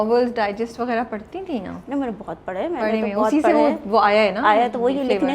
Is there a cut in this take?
no; 0 cuts

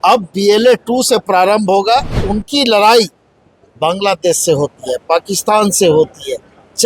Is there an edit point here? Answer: yes; 1 cut; at 2.2 s

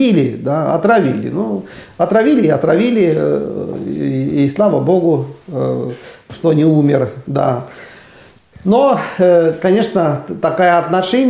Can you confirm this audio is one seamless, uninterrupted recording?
yes; 0 cuts

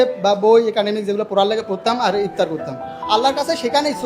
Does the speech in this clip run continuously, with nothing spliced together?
yes; 0 cuts

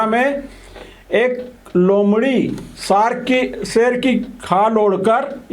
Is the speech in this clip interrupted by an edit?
no; 0 cuts

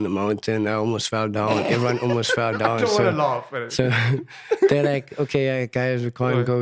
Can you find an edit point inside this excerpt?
no; 0 cuts

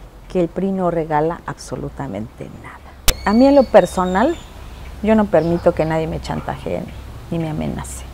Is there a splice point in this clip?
yes; 1 cut; at 3.2 s

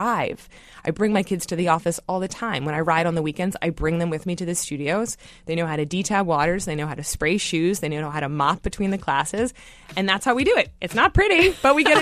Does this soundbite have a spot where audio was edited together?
yes; 1 cut; at 10.8 s

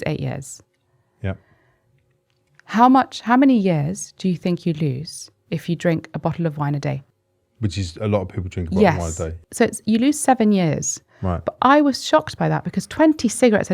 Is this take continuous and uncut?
no; 2 cuts; at 7.0 s, 9.4 s

